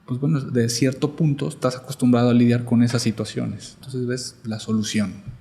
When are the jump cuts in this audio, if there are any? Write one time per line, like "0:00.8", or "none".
0:03.8

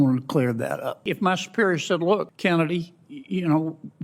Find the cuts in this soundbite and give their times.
0:01.1
0:02.3

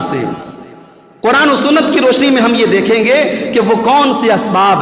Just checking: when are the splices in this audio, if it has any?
none

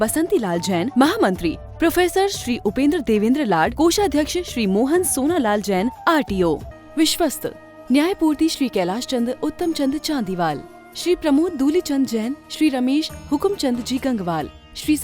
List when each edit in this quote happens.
0:06.7

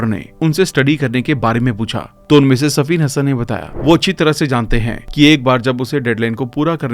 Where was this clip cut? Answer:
0:03.7

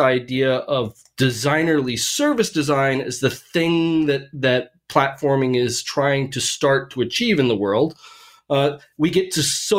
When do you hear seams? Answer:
none

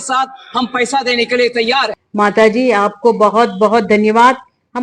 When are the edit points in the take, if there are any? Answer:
0:02.0

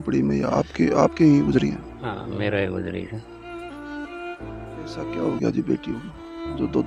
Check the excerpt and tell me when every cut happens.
none

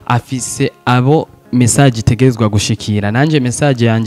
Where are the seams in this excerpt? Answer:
none

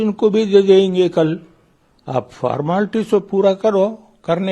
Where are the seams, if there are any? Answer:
none

